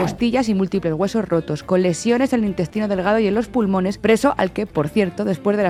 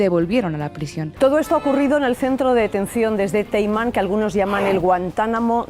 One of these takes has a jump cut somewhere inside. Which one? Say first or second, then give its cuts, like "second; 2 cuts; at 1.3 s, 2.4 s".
second; 1 cut; at 1.0 s